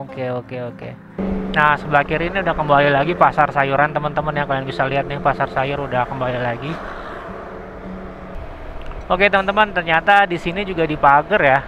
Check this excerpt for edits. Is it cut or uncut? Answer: cut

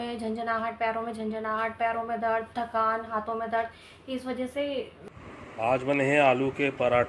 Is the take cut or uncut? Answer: cut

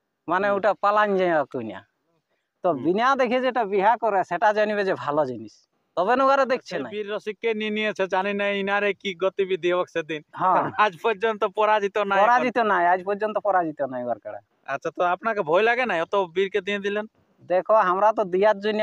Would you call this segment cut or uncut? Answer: cut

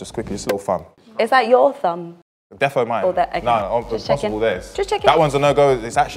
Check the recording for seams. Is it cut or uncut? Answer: uncut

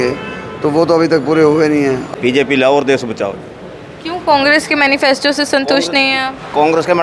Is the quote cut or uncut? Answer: cut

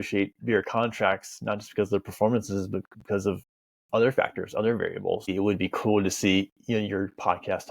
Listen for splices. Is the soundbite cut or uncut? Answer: cut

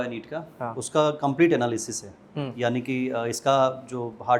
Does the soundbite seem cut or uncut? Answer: uncut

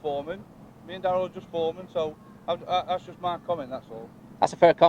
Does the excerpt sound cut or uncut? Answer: uncut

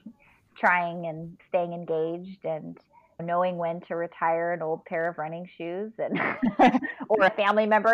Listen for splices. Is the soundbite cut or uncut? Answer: uncut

